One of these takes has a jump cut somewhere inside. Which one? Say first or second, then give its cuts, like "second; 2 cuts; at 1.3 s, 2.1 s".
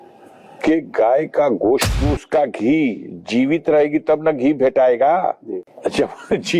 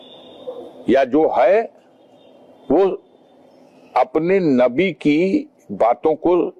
first; 2 cuts; at 1.9 s, 5.7 s